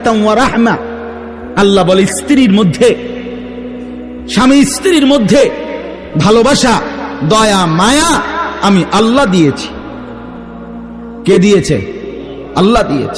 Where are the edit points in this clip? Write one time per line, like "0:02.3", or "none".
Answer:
0:03.0
0:04.4